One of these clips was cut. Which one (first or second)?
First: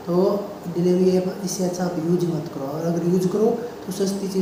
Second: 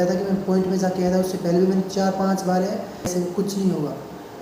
second